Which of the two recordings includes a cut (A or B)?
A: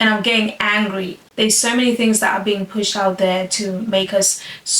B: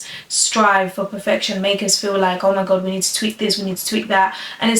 A